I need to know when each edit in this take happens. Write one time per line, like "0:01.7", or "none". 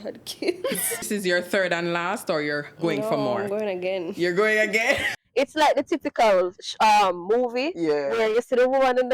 0:01.0
0:05.1